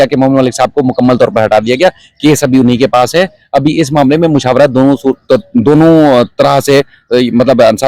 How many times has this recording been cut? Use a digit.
0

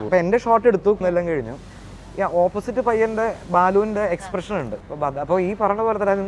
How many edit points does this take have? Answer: 0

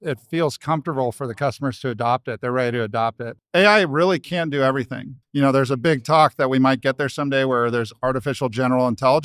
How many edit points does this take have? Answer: 2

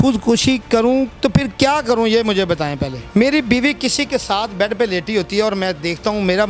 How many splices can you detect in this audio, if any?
2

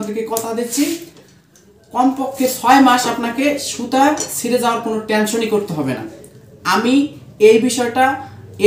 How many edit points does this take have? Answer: 0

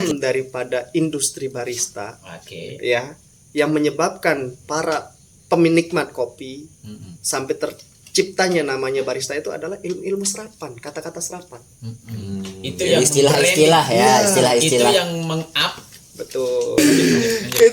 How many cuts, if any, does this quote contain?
1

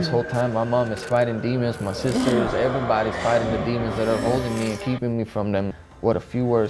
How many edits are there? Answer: 1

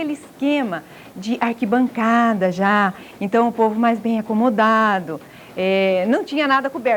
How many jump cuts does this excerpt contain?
0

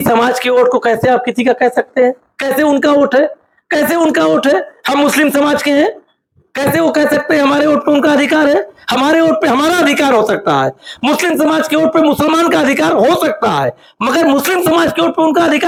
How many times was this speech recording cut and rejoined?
0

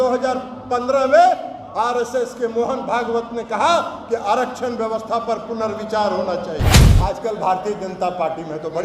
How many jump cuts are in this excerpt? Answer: 1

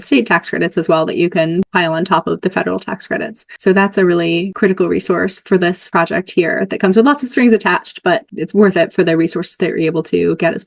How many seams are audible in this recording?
5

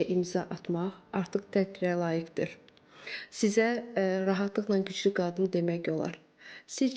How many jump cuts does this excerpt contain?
0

